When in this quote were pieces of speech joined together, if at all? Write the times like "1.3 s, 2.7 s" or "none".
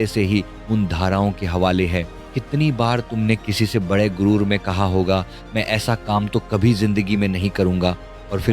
2.2 s